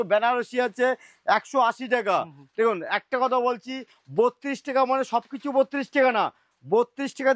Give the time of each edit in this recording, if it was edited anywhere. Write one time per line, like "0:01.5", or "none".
none

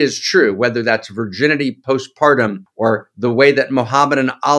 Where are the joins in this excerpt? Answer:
0:02.6

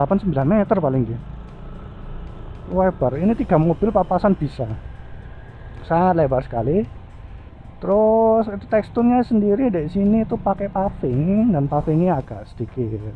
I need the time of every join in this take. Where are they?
none

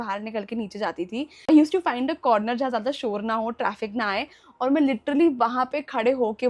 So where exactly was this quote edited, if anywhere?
none

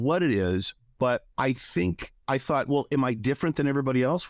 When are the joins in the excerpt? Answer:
0:01.9

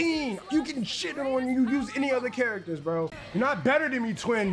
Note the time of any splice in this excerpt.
0:03.2

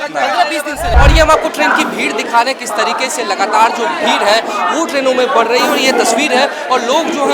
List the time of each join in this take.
0:00.9

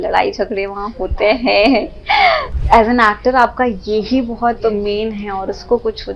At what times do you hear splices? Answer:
0:02.5

